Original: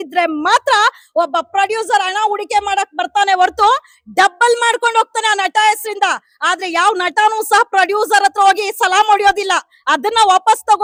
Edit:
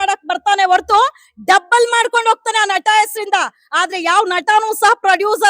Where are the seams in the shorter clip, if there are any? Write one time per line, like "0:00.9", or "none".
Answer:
none